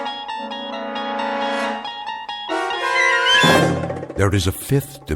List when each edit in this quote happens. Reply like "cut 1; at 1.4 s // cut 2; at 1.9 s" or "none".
cut 1; at 4.0 s